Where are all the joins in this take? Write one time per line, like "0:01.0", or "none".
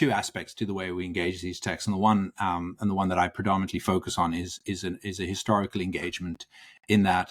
none